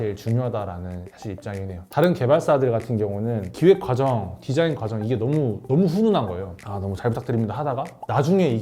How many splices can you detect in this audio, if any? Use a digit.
1